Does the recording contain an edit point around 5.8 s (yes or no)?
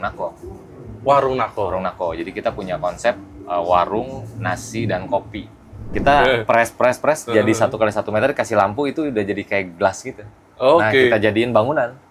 yes